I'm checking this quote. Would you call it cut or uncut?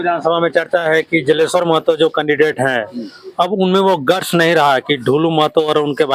uncut